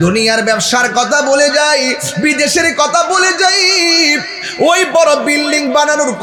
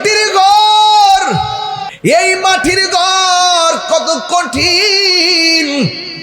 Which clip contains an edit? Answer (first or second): second